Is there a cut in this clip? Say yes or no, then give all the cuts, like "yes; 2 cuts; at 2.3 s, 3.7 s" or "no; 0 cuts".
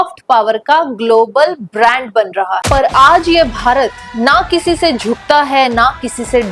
yes; 1 cut; at 2.6 s